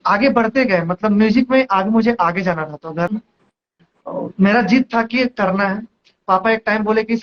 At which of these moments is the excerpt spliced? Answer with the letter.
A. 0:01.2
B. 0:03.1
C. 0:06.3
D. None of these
B